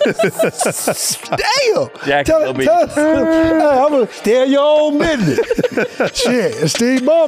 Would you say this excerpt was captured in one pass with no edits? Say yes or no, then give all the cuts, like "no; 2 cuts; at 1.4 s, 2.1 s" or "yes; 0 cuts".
no; 2 cuts; at 2.0 s, 4.1 s